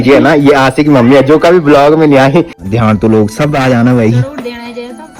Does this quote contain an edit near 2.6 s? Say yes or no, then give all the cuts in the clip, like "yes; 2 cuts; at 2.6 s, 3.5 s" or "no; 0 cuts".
yes; 1 cut; at 2.6 s